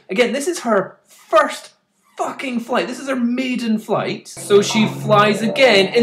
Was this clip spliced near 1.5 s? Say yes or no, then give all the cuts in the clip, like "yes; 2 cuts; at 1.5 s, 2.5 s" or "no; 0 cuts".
no; 1 cut; at 4.3 s